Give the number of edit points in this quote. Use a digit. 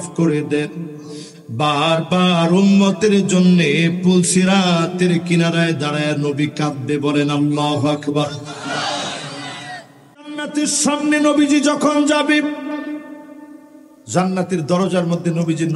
1